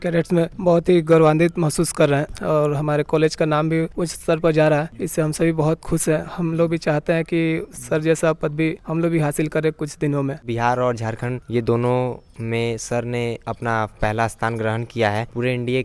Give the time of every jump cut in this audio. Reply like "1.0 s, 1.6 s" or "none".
none